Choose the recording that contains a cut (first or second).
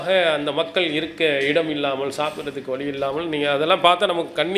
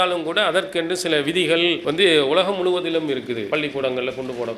second